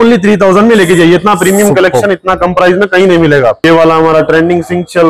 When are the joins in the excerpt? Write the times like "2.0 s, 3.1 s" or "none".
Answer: 3.6 s